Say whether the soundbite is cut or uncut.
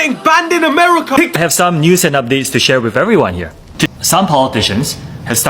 cut